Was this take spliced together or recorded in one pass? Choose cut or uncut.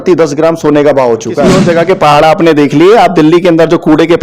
cut